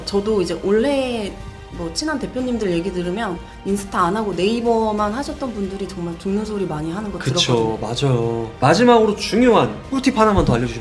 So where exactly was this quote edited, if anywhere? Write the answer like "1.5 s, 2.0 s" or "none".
8.5 s